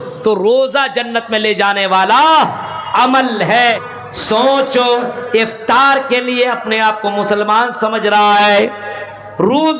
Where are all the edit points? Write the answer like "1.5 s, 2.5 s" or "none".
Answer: 3.9 s

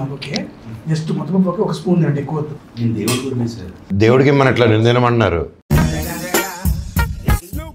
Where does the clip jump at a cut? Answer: 3.7 s

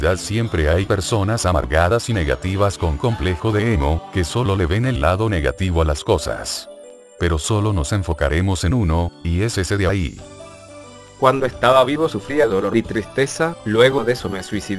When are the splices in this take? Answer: none

